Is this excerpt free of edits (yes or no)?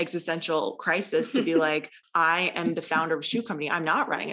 no